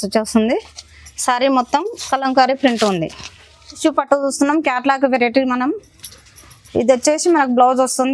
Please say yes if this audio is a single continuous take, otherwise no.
no